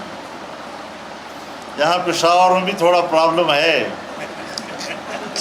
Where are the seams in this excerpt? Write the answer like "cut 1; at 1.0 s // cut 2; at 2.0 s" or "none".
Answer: none